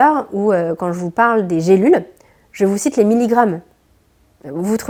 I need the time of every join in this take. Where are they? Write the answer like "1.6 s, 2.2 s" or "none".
none

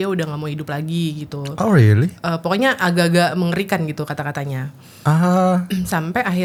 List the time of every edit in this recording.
none

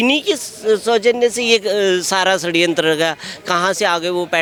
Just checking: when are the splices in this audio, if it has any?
none

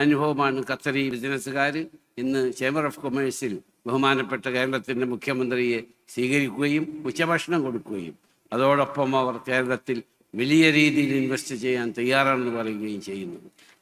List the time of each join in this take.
1.1 s

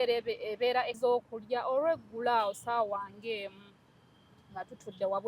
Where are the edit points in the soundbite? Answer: 1.0 s

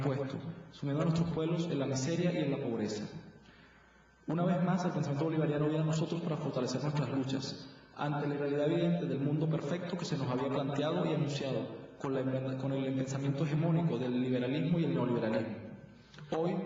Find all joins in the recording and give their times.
none

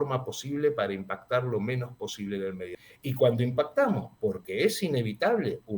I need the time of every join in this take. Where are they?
2.7 s

